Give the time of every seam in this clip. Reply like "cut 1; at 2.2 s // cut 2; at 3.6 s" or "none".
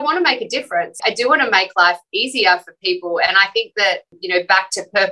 cut 1; at 1.0 s // cut 2; at 4.1 s